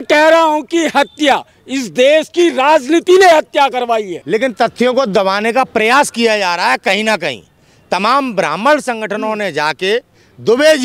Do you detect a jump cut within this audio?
yes; 1 cut; at 4.1 s

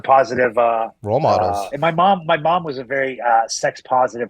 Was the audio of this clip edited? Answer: yes; 2 cuts; at 1.0 s, 1.7 s

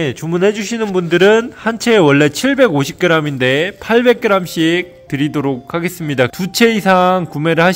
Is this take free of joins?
yes; 0 cuts

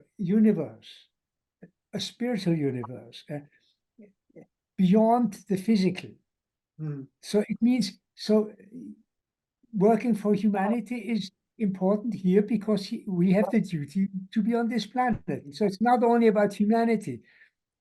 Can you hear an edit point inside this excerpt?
yes; 1 cut; at 15.5 s

